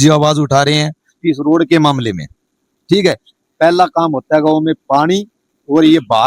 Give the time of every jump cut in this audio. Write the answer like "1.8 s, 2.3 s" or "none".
none